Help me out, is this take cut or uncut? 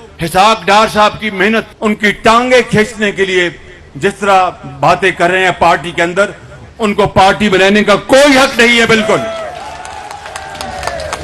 cut